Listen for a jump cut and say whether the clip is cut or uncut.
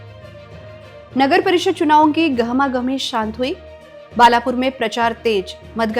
cut